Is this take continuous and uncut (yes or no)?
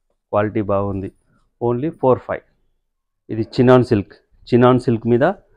yes